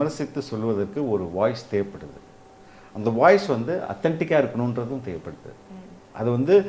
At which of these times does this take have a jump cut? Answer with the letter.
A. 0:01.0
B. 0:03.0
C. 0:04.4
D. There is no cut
D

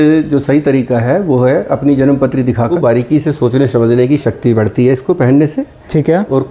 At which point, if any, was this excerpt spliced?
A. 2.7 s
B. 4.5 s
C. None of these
A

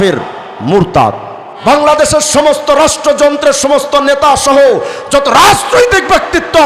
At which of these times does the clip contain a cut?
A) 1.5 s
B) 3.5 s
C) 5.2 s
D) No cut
A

